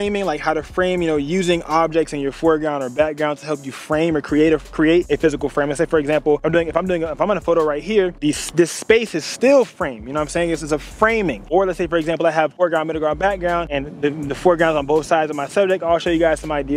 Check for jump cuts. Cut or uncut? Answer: uncut